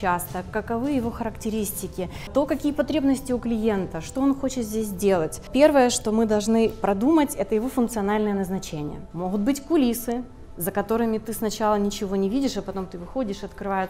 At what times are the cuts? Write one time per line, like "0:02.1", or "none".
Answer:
0:02.3
0:05.5
0:09.0